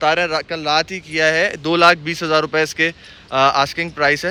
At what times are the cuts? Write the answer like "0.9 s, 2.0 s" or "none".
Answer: none